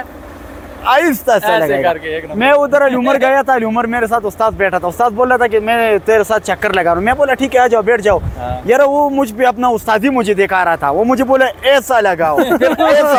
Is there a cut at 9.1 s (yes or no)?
no